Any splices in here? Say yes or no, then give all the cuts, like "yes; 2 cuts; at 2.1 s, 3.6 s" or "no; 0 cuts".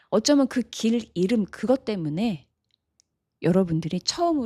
no; 0 cuts